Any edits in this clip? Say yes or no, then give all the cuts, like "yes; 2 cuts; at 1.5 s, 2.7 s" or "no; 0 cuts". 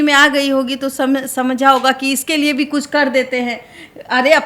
no; 0 cuts